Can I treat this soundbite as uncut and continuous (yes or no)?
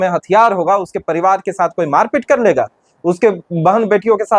yes